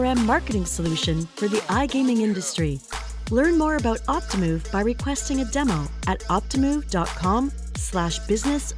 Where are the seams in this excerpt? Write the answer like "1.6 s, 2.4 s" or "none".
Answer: none